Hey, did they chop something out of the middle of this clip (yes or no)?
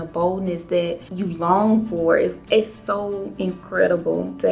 yes